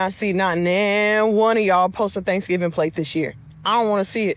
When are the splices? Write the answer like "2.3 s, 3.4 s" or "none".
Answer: none

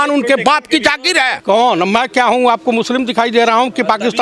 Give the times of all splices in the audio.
1.4 s

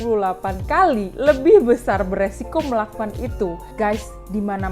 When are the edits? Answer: 3.6 s

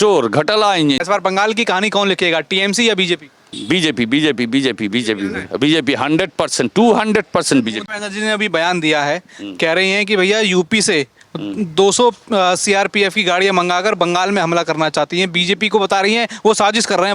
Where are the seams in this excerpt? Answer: 1.0 s, 7.8 s

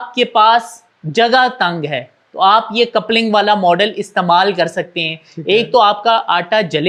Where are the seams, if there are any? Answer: none

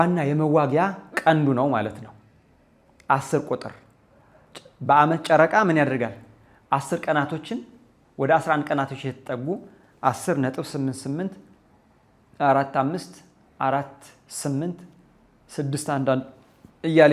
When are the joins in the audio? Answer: none

